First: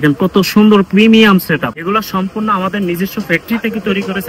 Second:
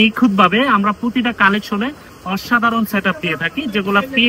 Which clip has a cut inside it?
first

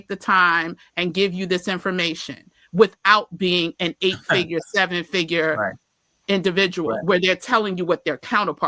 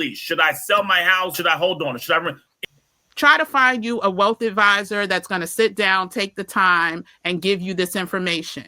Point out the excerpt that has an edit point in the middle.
second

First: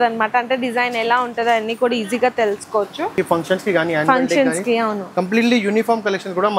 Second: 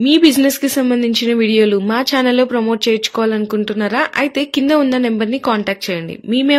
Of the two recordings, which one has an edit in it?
first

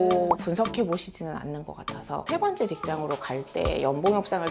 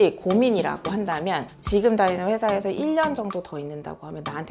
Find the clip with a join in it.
first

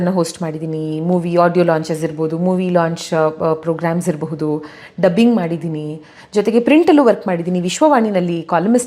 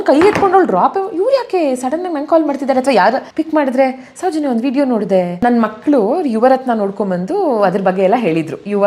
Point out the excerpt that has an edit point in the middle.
second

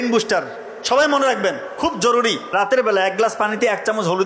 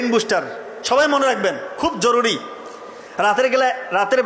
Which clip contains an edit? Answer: first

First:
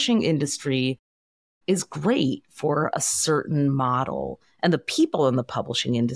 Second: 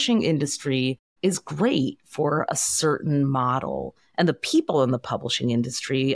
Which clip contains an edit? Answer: second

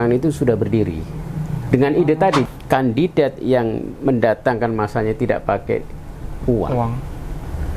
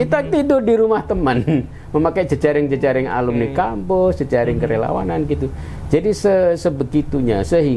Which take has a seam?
first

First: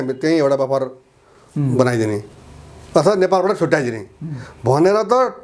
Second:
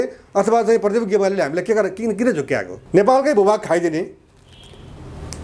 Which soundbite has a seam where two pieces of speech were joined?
second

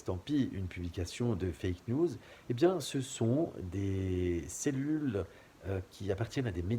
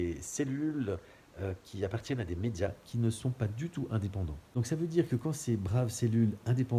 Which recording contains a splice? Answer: second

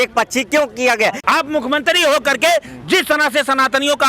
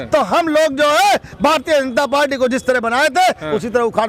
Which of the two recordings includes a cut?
first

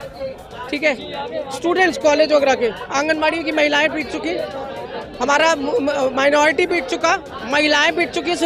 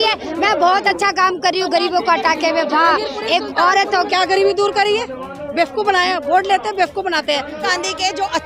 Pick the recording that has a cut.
second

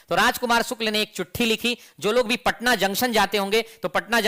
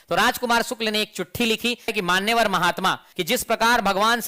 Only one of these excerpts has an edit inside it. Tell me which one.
second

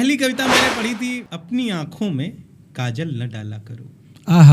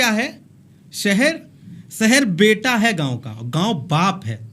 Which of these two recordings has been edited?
first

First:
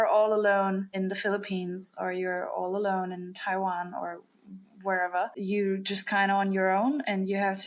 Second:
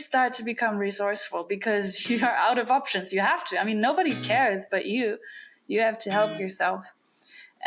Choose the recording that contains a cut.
first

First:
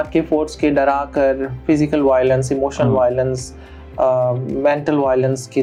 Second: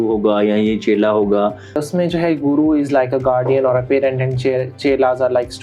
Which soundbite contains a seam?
second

